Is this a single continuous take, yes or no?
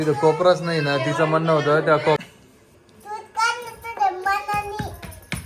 no